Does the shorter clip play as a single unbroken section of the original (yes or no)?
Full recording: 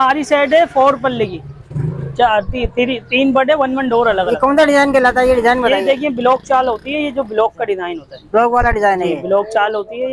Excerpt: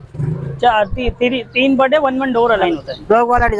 no